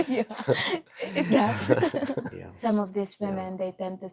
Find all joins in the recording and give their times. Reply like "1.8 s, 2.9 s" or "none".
2.4 s

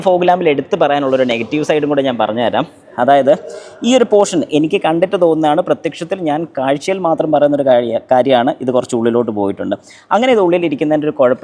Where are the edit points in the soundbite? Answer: none

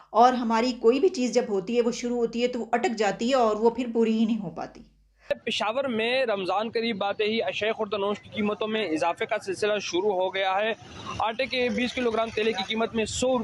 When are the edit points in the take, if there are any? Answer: 5.3 s

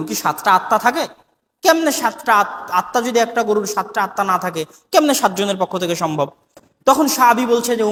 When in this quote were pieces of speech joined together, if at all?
none

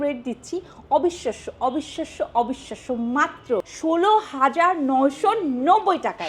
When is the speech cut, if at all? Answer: 3.7 s

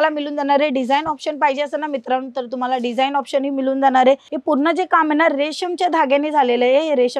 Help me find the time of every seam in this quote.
4.3 s

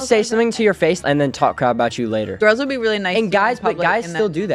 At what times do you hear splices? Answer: none

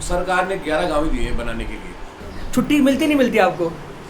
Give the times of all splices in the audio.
2.1 s

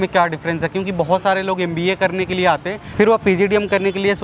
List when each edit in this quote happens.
none

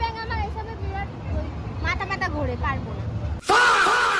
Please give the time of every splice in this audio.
3.3 s

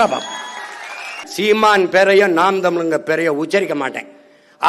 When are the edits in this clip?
1.2 s

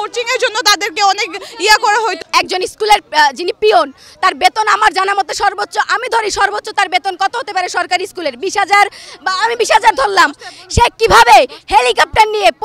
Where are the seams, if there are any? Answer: 2.2 s

